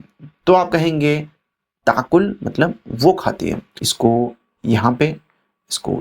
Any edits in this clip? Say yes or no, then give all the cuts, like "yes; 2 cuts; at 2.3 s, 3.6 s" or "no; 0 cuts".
yes; 1 cut; at 3.9 s